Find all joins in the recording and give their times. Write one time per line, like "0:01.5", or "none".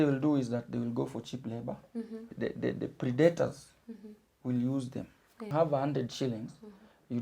0:02.3
0:05.5

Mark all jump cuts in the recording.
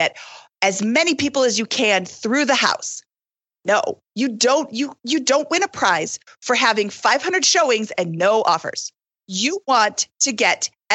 0:08.9

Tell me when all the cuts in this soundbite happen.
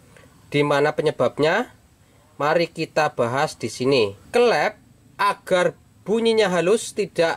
0:04.2

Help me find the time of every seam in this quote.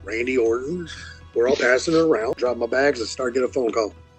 0:02.4

